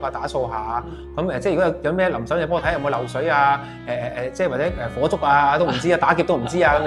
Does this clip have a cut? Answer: no; 0 cuts

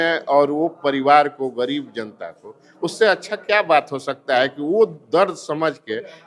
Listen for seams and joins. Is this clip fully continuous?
yes; 0 cuts

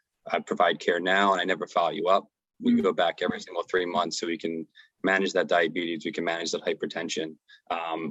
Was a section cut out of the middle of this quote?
no; 0 cuts

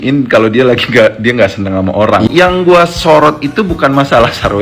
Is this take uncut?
no; 1 cut; at 2.3 s

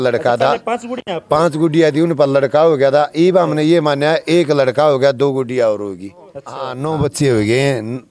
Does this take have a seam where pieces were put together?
yes; 1 cut; at 6.7 s

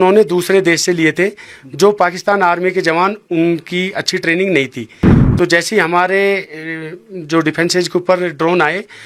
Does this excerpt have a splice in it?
no; 0 cuts

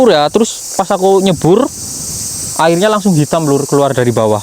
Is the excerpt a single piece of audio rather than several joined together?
yes; 0 cuts

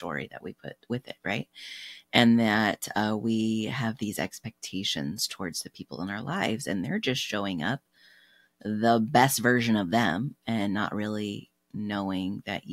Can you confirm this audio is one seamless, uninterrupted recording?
yes; 0 cuts

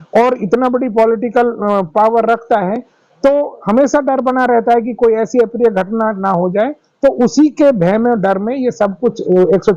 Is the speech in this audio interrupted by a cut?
no; 0 cuts

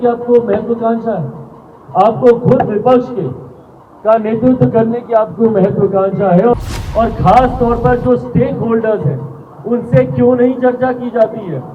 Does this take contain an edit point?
yes; 1 cut; at 6.5 s

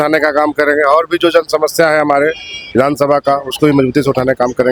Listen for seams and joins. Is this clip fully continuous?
yes; 0 cuts

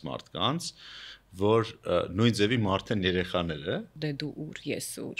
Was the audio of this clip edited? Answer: yes; 1 cut; at 3.9 s

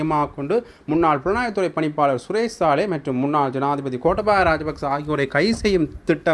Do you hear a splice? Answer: no; 0 cuts

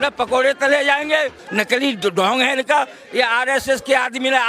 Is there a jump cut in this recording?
yes; 1 cut; at 1.4 s

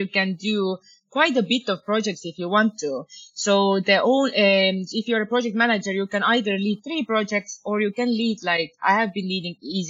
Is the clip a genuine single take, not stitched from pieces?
yes; 0 cuts

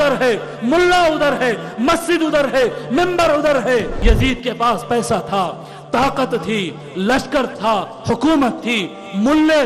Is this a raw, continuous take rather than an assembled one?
no; 1 cut; at 3.9 s

